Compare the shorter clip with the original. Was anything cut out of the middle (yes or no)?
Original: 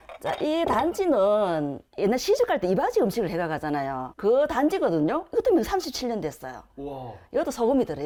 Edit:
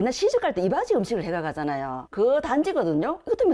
no